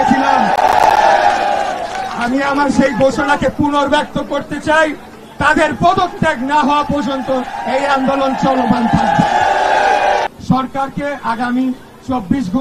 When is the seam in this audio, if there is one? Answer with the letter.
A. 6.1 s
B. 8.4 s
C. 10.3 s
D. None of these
C